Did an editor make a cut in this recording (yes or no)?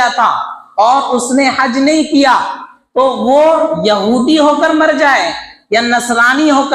no